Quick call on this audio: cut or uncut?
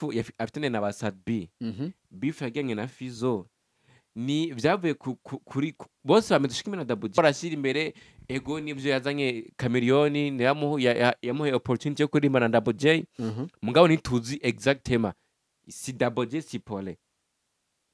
uncut